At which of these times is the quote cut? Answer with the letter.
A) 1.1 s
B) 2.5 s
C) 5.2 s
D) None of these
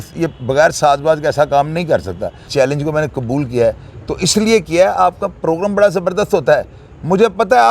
B